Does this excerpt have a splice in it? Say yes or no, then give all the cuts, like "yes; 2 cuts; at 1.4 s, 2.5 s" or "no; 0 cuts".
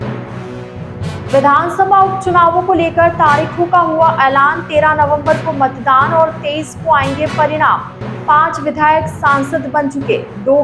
yes; 1 cut; at 1.3 s